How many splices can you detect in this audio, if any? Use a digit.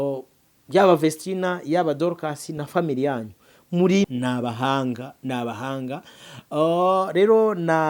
1